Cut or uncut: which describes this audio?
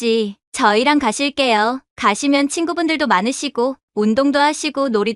uncut